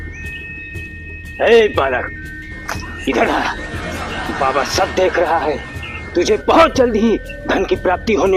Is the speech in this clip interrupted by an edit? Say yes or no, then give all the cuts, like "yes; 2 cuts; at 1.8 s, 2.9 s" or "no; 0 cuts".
no; 0 cuts